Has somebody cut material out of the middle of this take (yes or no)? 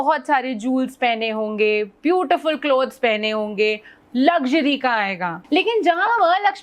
yes